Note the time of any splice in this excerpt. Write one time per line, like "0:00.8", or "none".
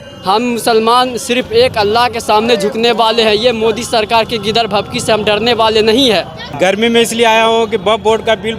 0:06.4